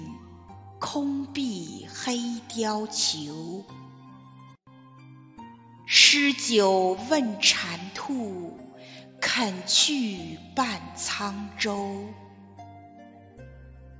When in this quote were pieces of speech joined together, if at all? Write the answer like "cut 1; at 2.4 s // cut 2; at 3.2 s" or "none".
cut 1; at 12.8 s